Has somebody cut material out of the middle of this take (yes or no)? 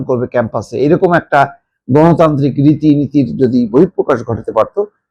no